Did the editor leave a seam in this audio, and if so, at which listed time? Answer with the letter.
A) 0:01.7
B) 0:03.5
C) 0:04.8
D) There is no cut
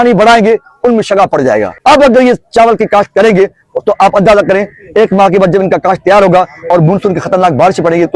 A